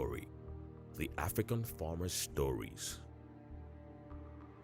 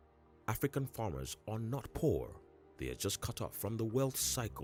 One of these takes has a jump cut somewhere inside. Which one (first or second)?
first